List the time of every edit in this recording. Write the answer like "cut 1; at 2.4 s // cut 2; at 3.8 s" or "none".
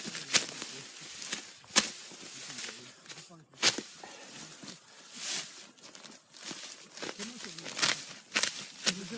none